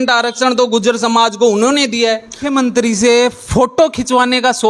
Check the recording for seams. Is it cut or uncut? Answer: cut